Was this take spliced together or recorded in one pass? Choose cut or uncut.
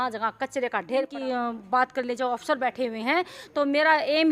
cut